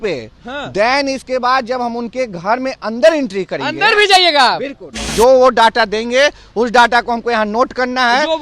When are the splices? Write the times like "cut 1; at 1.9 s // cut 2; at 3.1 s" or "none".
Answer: cut 1; at 5.0 s